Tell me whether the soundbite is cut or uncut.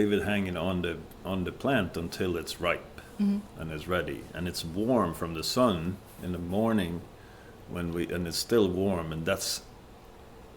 uncut